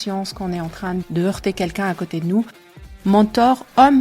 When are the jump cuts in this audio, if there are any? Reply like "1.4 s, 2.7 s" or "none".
1.0 s, 2.7 s